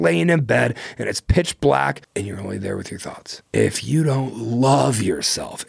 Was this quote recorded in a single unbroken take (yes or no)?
no